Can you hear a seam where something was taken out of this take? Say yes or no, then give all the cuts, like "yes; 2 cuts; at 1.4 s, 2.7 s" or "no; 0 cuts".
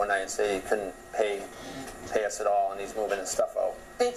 no; 0 cuts